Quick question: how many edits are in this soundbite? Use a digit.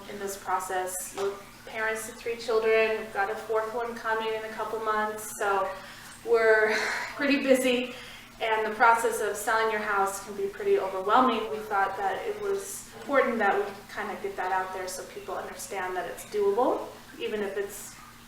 4